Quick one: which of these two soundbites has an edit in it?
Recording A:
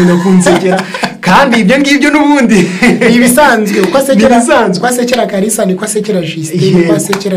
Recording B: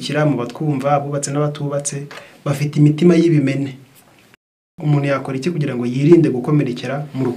B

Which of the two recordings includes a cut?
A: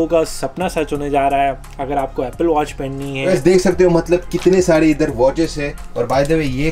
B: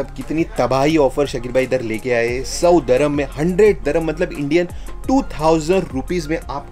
A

